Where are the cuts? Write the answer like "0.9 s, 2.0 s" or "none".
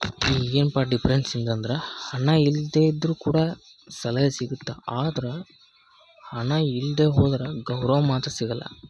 none